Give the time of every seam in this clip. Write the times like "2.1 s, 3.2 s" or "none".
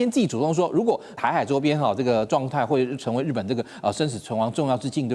1.2 s